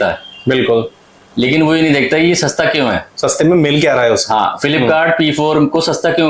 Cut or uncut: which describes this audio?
uncut